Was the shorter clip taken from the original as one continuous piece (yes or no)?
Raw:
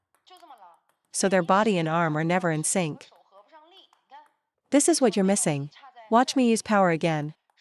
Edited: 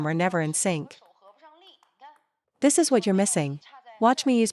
yes